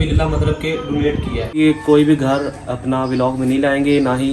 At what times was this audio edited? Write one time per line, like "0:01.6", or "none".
0:01.4